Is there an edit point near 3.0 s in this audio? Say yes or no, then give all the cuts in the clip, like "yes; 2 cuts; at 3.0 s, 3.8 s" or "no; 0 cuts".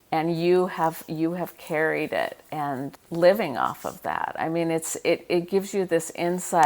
yes; 1 cut; at 3.0 s